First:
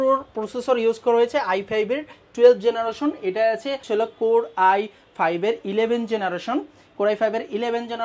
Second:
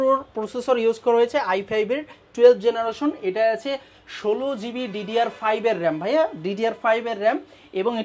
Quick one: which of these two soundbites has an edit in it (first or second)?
first